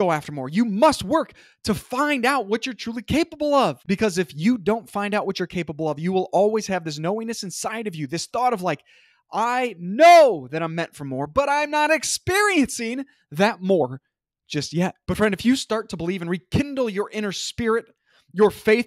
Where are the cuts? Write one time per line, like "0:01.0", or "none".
0:03.8
0:15.0

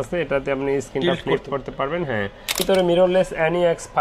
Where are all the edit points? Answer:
0:02.6

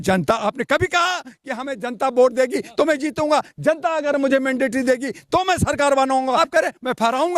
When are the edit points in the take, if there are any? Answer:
0:06.4

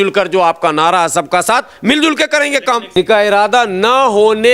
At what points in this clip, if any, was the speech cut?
0:03.0

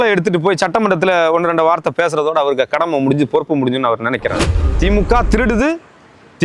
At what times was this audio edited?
0:04.7

